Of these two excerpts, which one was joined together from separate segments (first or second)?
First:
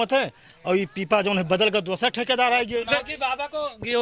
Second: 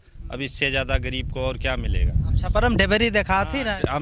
first